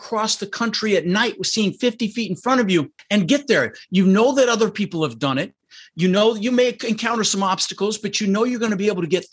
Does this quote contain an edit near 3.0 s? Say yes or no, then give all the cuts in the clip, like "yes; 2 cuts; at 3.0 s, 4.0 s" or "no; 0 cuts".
yes; 1 cut; at 3.0 s